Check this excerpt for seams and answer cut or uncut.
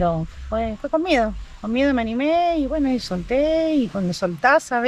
uncut